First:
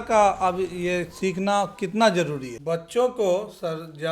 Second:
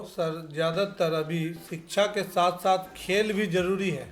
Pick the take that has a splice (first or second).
first